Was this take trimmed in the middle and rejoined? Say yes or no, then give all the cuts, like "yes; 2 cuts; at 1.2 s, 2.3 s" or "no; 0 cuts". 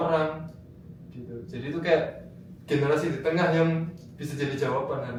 no; 0 cuts